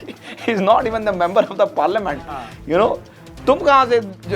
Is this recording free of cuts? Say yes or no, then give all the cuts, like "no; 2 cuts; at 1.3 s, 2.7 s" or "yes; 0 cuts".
yes; 0 cuts